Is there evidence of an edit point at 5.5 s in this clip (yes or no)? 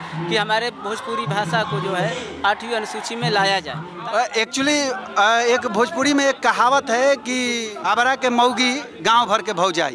no